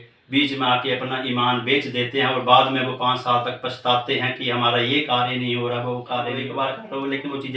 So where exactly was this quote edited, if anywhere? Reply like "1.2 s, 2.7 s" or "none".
6.5 s